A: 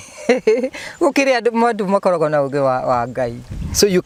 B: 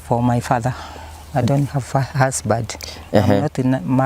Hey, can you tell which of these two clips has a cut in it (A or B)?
B